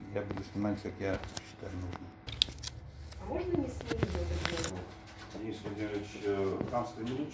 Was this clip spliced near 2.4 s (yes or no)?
yes